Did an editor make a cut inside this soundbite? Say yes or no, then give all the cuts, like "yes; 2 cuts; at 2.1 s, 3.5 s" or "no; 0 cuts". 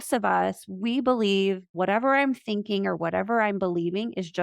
yes; 1 cut; at 1.7 s